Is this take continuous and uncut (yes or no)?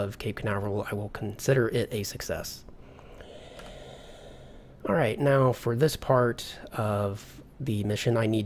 yes